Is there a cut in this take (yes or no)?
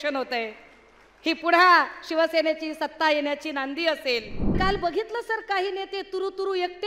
yes